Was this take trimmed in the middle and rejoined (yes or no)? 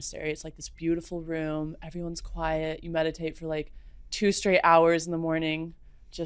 no